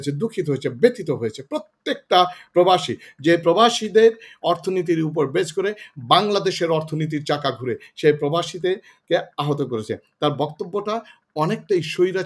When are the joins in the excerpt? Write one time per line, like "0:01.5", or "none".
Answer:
none